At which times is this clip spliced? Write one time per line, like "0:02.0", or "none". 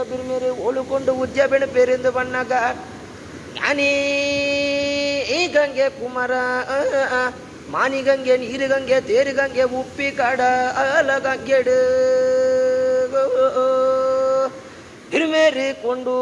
none